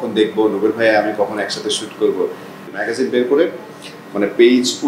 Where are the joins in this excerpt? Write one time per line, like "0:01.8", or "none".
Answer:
0:02.6